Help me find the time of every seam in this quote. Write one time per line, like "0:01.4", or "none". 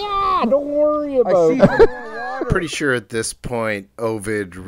0:02.5